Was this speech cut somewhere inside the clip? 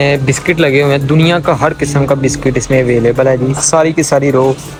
no; 0 cuts

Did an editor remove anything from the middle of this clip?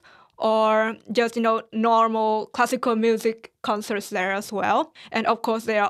yes; 1 cut; at 5.0 s

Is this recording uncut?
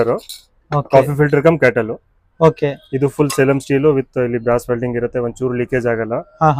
yes; 0 cuts

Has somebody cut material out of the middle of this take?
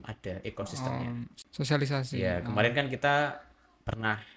yes; 1 cut; at 1.4 s

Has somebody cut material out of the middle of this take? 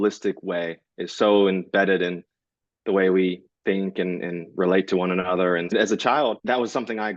yes; 2 cuts; at 5.7 s, 6.4 s

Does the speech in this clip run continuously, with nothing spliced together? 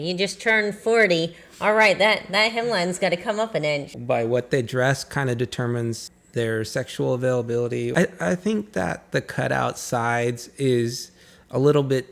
no; 2 cuts; at 3.9 s, 7.9 s

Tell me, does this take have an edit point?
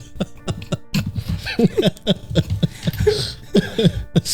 no; 0 cuts

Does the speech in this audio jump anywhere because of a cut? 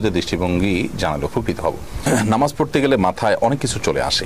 yes; 1 cut; at 2.1 s

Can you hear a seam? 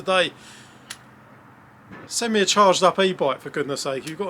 yes; 1 cut; at 2.0 s

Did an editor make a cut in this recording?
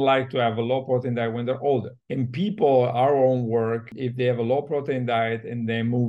yes; 2 cuts; at 2.0 s, 3.9 s

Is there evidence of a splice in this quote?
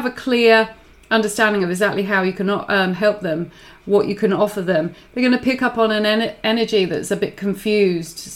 no; 0 cuts

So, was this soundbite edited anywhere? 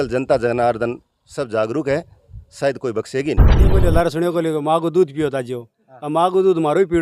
yes; 1 cut; at 3.7 s

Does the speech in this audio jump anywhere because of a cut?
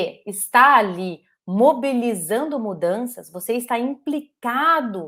no; 0 cuts

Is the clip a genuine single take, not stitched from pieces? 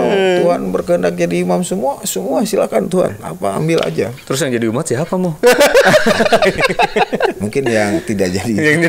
yes; 0 cuts

